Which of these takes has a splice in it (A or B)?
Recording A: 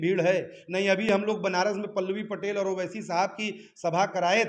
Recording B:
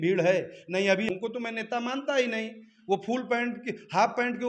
B